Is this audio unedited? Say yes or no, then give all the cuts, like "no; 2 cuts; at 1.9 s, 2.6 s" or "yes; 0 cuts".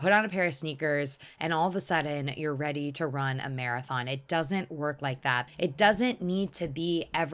no; 1 cut; at 5.4 s